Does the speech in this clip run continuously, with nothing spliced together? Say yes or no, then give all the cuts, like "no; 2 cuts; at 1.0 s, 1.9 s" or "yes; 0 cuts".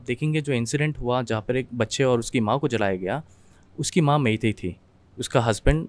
yes; 0 cuts